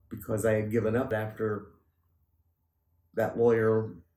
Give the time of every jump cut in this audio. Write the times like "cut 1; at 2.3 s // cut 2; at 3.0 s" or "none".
cut 1; at 1.1 s